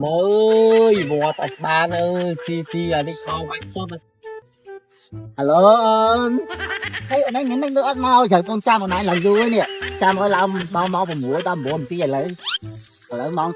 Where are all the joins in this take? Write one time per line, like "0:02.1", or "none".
0:04.5